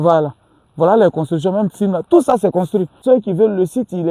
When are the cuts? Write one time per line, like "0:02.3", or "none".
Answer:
0:03.0

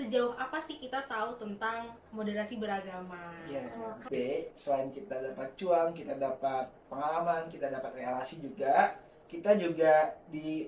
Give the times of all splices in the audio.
0:04.0

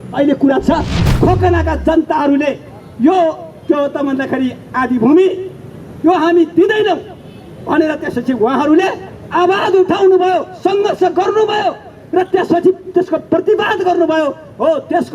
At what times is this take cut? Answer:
0:01.0

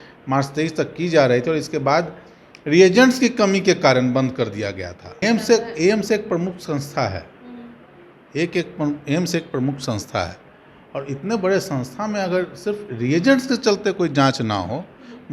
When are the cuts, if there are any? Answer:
0:05.2

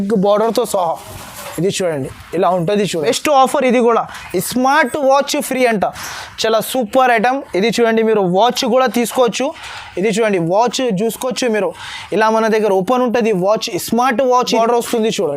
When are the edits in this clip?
0:03.0
0:14.5

